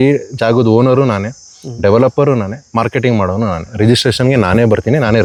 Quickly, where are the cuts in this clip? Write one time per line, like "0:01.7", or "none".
none